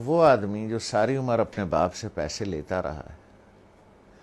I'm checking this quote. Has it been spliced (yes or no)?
no